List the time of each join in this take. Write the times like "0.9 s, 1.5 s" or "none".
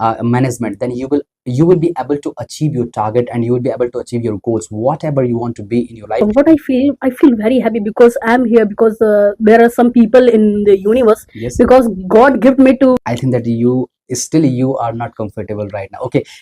6.2 s, 13.0 s